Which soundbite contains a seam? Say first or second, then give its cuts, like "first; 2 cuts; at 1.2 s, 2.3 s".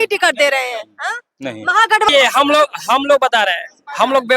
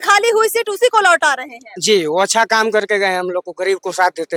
first; 1 cut; at 2.1 s